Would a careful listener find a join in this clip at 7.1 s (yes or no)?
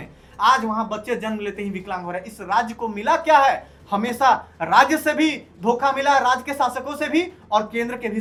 no